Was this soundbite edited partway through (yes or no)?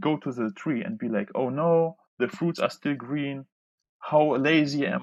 no